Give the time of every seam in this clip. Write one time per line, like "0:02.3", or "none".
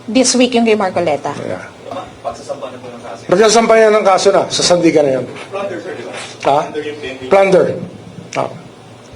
0:01.9